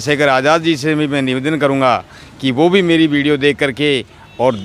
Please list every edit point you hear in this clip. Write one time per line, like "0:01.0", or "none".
none